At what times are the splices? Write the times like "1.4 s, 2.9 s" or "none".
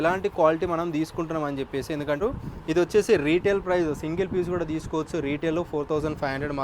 2.2 s